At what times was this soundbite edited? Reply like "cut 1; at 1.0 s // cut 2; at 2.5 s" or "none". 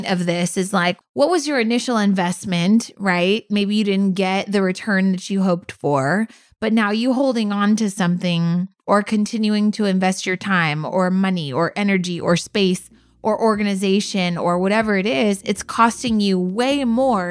cut 1; at 1.0 s